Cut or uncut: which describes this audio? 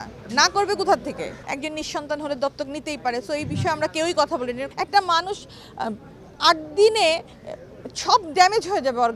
cut